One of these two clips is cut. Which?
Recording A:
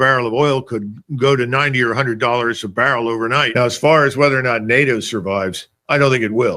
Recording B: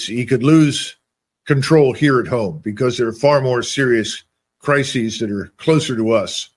A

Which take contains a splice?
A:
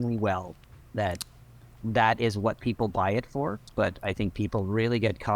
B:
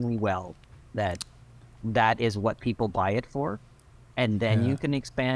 A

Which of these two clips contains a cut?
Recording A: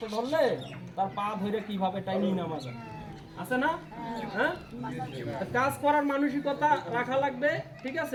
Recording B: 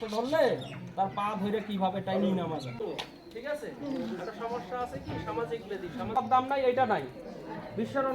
B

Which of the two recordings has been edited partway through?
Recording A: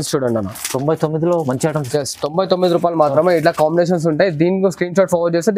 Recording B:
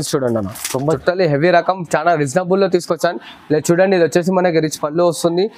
B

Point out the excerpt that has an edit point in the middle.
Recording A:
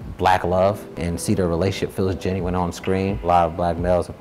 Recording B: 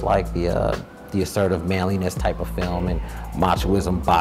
A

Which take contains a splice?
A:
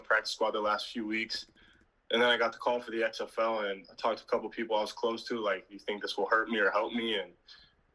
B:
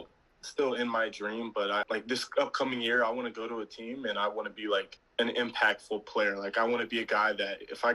B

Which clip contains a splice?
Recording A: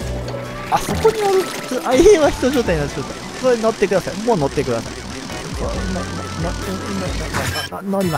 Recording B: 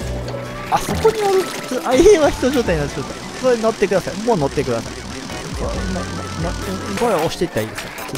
B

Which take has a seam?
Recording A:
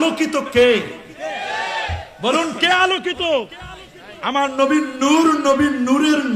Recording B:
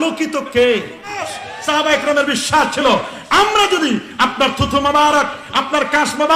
B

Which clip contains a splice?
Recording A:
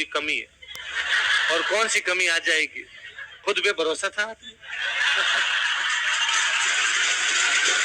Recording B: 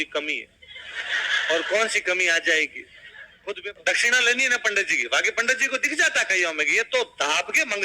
B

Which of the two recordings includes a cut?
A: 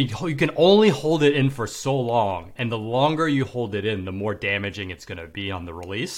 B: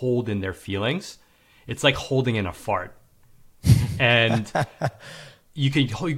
A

